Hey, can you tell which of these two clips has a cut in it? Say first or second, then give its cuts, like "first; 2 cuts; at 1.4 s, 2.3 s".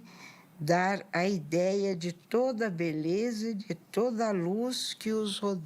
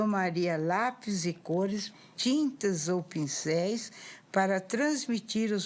second; 1 cut; at 2.0 s